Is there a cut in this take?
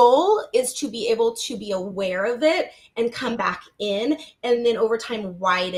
no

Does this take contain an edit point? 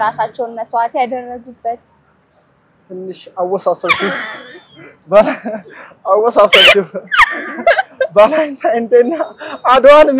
no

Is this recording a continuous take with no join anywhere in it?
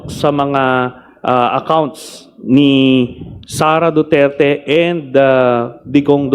yes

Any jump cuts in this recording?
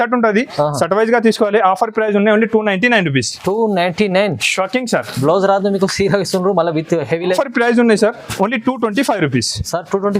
yes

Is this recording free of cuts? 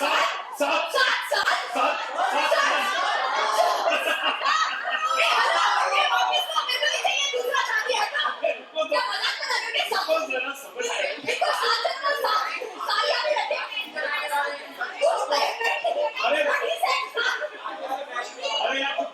yes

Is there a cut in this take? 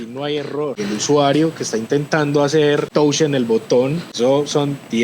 yes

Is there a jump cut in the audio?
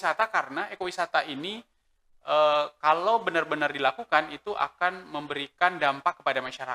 no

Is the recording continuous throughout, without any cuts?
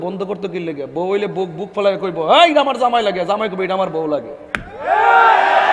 yes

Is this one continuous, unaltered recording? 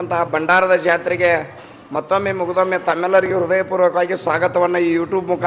yes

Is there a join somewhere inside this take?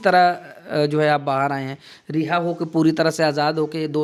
no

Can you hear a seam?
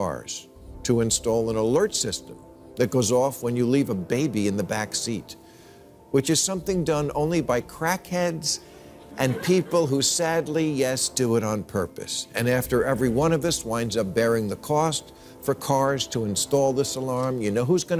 no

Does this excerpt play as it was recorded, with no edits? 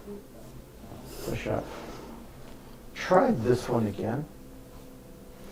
yes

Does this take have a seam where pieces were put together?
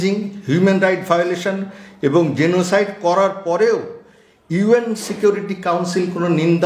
no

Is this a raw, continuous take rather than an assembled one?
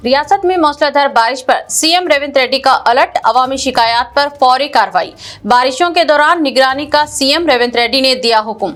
yes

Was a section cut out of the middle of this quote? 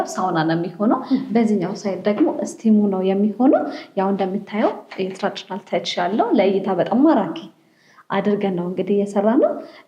no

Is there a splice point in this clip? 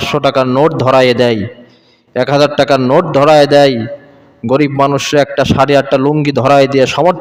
no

